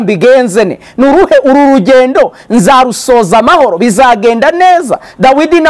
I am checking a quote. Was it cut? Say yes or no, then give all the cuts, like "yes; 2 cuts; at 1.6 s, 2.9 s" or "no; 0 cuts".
no; 0 cuts